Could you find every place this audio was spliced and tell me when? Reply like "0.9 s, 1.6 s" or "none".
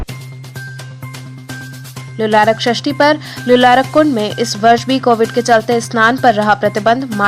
2.0 s